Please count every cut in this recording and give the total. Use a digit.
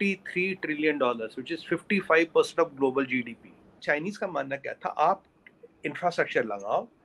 1